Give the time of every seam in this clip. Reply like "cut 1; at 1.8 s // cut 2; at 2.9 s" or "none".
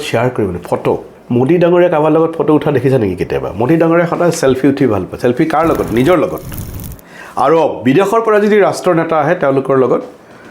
cut 1; at 1.1 s